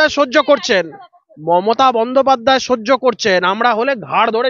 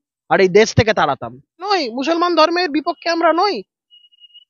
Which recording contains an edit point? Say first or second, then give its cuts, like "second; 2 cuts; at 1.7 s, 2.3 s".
second; 1 cut; at 1.7 s